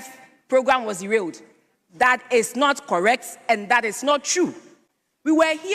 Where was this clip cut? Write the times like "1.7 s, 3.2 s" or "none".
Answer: none